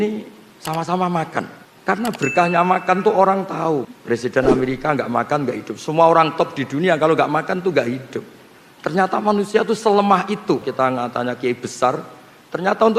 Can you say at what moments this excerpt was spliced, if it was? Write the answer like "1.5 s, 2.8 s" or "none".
1.6 s, 3.9 s, 10.7 s